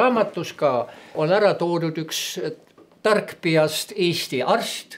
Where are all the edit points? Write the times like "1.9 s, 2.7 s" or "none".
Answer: 1.1 s